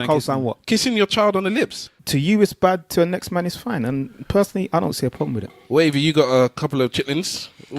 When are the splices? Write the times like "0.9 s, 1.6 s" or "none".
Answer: 1.8 s